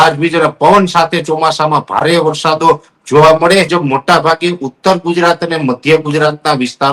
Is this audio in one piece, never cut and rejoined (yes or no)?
no